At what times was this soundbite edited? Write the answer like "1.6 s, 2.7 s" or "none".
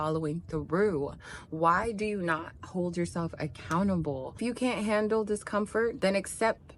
4.3 s